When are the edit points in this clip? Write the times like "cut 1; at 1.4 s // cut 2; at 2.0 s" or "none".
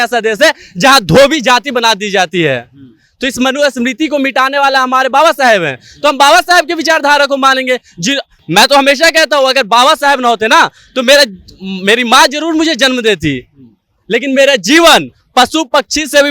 none